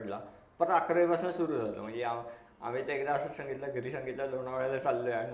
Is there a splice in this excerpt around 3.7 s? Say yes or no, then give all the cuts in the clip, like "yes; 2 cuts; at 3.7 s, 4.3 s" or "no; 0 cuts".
no; 0 cuts